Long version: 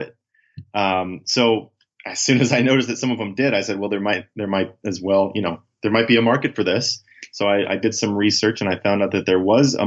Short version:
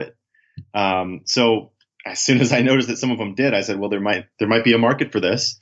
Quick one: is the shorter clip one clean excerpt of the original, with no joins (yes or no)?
no